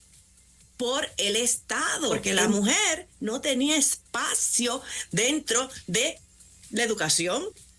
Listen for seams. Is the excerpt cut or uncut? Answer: cut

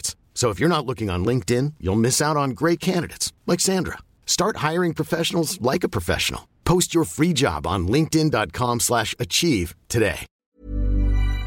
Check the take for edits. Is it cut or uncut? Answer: cut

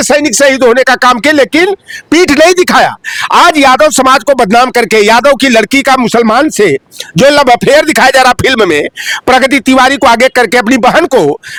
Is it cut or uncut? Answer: uncut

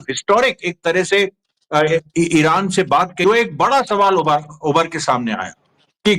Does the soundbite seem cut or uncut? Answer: cut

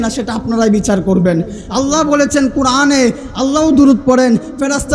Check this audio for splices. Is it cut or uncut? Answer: uncut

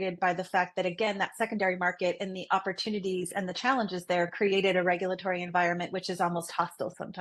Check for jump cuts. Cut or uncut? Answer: uncut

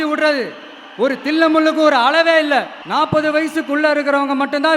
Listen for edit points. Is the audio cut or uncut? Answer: cut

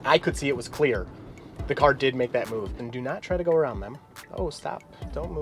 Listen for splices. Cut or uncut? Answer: cut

